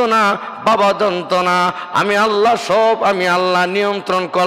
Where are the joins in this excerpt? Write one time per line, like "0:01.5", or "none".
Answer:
none